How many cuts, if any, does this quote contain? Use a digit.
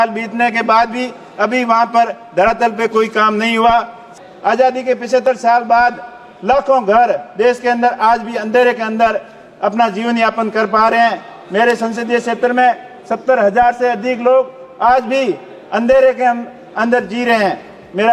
1